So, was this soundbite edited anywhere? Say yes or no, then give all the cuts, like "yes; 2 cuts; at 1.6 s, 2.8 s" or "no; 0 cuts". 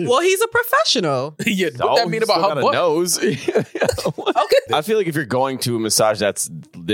yes; 1 cut; at 4.7 s